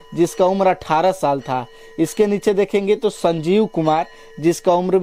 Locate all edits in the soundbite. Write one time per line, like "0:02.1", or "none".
none